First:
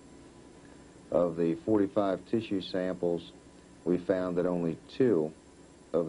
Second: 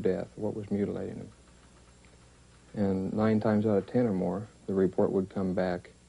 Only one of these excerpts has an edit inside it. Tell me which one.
second; 1 cut; at 1.6 s

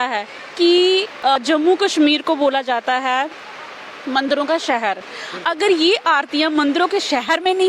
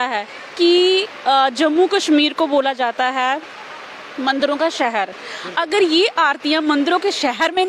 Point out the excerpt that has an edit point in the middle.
first; 1 cut; at 1.3 s

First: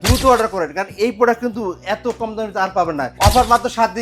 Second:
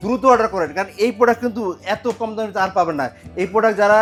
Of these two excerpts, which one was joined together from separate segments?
first; 1 cut; at 3.1 s

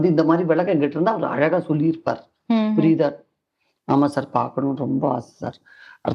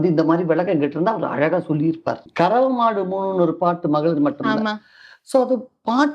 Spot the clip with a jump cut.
second; 1 cut; at 2.3 s

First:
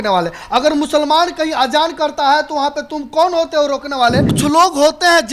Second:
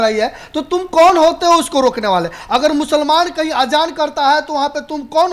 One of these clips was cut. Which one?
first; 1 cut; at 4.3 s

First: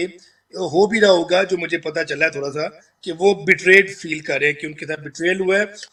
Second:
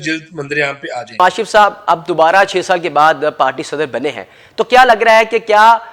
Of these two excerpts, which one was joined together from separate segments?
second; 1 cut; at 1.2 s

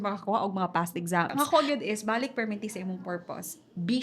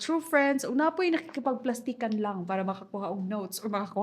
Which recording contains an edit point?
first; 1 cut; at 1.3 s

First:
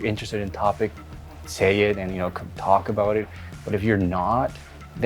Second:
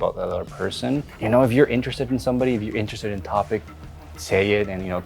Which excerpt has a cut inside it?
second; 1 cut; at 1.1 s

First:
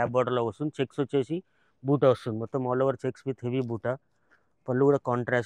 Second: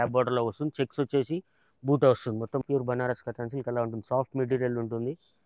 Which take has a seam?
second; 1 cut; at 2.6 s

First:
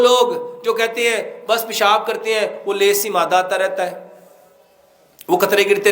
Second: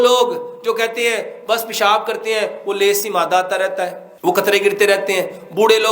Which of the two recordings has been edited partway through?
second; 1 cut; at 4.1 s

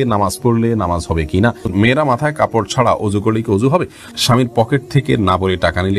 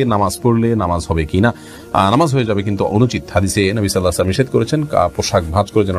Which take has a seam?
first; 2 cuts; at 1.7 s, 4.1 s

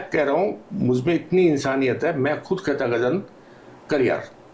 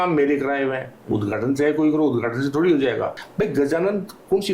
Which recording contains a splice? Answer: second; 1 cut; at 3.2 s

